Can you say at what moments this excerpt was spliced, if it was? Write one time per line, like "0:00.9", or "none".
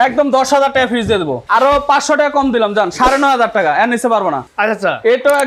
0:01.4
0:04.4